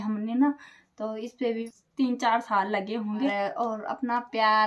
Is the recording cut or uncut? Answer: cut